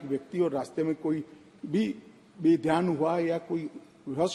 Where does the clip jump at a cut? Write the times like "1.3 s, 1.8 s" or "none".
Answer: none